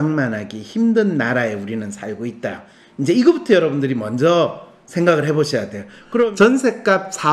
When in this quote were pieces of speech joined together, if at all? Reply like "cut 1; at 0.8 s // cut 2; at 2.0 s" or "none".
cut 1; at 6.3 s